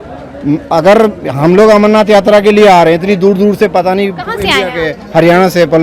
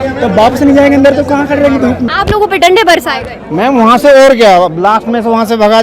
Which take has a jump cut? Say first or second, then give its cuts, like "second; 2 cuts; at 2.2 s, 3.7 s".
second; 1 cut; at 2.1 s